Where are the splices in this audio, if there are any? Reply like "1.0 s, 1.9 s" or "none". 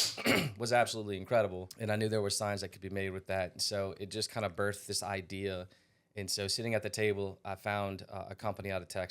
1.7 s